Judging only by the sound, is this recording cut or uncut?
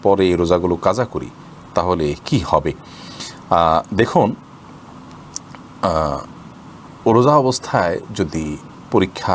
uncut